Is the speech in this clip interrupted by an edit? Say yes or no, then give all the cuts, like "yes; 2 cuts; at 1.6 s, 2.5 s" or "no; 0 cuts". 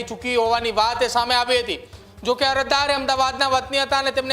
no; 0 cuts